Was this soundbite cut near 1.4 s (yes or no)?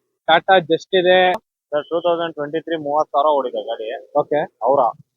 yes